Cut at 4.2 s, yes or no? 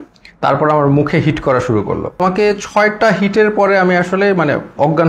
no